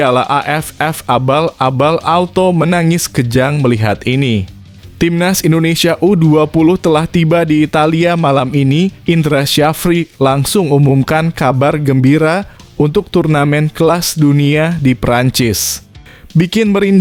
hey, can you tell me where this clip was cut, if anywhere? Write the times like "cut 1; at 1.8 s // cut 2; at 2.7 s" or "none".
none